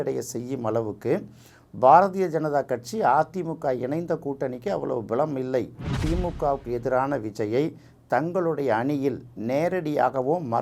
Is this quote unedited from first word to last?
no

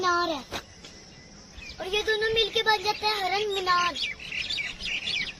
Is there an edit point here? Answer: no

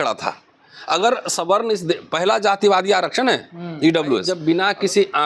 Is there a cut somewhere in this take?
yes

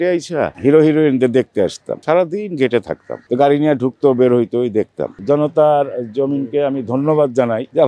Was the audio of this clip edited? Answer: yes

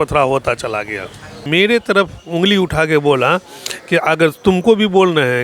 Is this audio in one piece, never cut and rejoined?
no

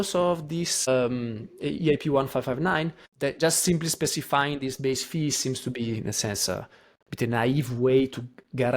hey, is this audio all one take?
no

